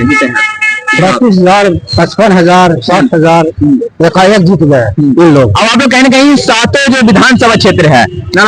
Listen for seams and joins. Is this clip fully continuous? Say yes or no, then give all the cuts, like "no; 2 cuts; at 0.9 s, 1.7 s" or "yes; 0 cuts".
yes; 0 cuts